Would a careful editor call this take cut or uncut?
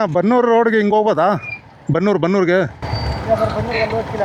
uncut